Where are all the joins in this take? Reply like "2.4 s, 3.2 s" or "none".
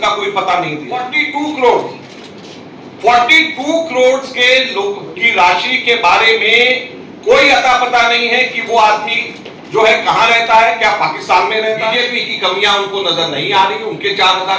1.2 s, 11.9 s

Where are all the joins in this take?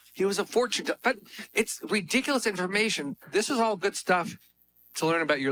3.2 s

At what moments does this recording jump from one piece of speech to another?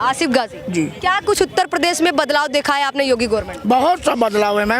0.9 s

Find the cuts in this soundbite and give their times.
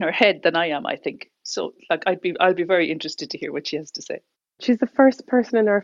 1.8 s, 4.6 s

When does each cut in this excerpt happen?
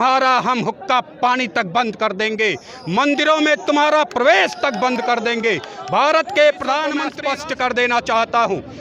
7.1 s

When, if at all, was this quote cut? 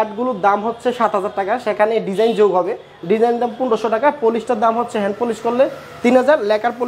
none

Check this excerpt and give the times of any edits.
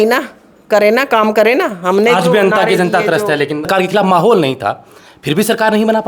3.6 s

